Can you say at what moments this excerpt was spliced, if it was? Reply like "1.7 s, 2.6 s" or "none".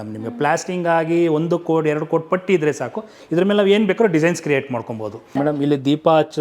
5.2 s